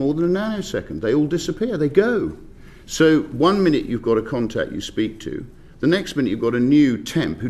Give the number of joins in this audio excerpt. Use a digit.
0